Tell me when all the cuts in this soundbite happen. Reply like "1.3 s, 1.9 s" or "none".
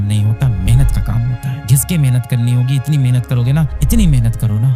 1.6 s